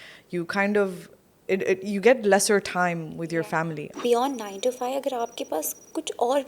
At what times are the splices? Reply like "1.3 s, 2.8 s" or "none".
3.8 s